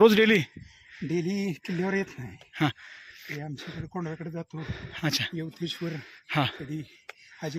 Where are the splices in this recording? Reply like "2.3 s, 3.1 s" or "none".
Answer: none